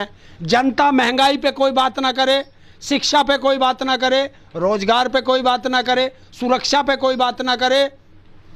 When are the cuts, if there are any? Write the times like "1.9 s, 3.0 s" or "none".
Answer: none